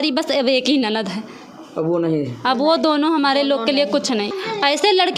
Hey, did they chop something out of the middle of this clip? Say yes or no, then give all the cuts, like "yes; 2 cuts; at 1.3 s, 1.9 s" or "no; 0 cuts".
yes; 1 cut; at 4.3 s